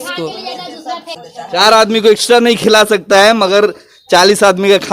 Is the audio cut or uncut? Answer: cut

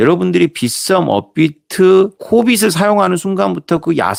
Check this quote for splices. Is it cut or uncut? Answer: uncut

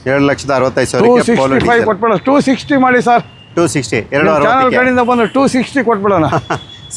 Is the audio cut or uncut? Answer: uncut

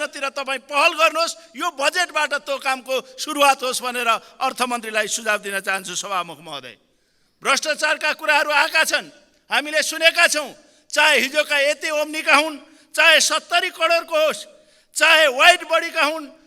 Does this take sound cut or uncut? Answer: uncut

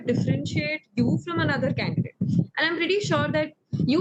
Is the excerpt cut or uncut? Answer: uncut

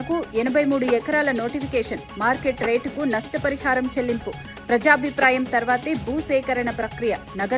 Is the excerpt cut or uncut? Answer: uncut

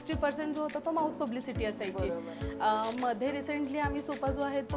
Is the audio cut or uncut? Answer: uncut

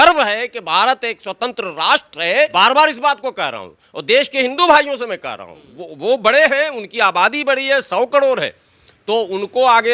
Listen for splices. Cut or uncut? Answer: cut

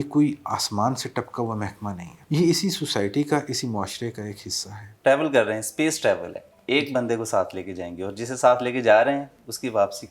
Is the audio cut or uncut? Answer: cut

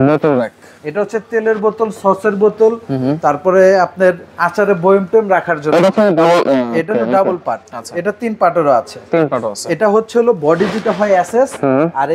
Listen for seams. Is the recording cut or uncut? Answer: uncut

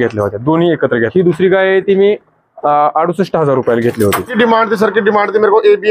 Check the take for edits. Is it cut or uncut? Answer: cut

